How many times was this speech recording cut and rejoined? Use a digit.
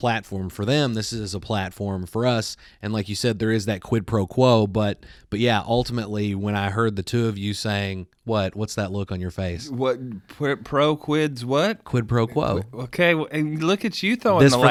0